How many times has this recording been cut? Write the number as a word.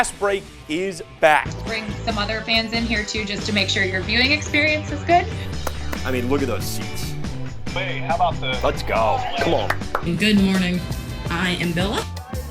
two